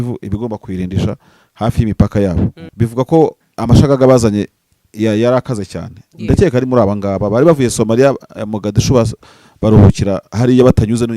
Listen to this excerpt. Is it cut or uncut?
cut